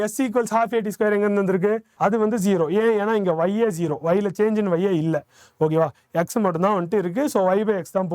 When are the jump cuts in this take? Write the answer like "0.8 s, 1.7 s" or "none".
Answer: 1.9 s